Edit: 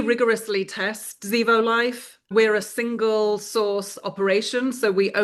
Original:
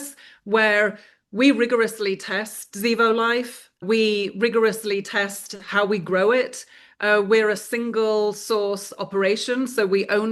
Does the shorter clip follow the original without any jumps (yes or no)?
no